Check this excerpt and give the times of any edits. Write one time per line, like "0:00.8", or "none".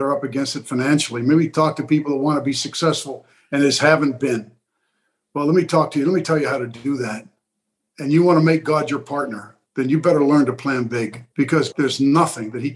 0:11.7